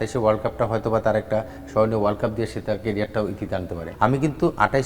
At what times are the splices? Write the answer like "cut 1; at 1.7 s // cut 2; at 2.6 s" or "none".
cut 1; at 3.8 s